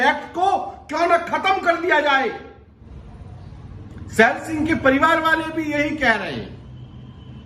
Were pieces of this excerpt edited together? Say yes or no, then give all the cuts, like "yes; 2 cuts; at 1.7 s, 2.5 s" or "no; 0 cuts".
yes; 1 cut; at 2.9 s